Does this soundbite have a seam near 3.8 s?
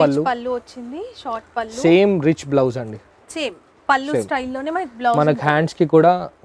no; 0 cuts

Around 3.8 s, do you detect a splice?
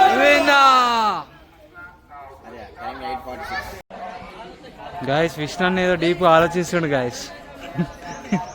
yes; 1 cut; at 3.8 s

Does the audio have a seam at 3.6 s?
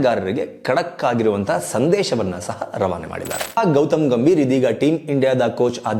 yes; 1 cut; at 3.6 s

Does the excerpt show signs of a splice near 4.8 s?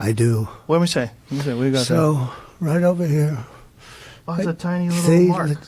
yes; 1 cut; at 4.8 s

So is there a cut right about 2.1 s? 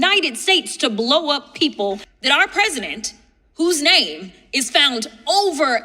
yes; 1 cut; at 2.1 s

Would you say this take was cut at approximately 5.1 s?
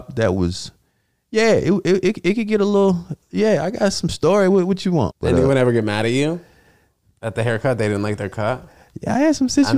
yes; 1 cut; at 5.1 s

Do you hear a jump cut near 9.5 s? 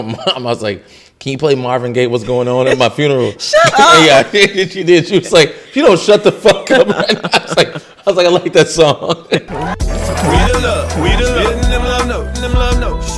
yes; 1 cut; at 9.5 s

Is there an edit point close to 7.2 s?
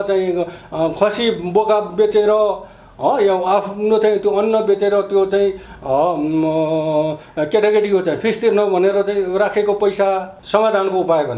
no; 1 cut; at 10.3 s

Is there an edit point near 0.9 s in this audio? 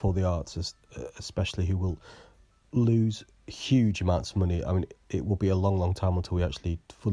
no; 0 cuts

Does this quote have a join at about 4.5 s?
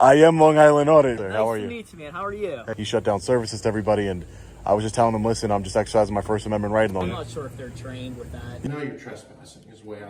no; 4 cuts; at 1.2 s, 2.7 s, 7.0 s, 8.7 s

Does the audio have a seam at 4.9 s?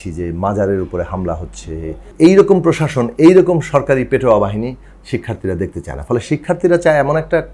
no; 1 cut; at 2.0 s

